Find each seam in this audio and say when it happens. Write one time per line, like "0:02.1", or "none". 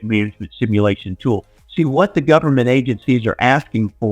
0:01.5